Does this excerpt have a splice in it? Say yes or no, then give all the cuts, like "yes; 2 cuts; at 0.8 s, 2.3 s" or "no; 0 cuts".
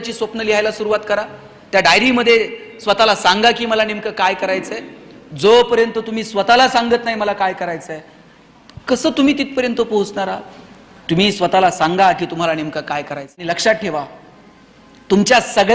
yes; 1 cut; at 13.4 s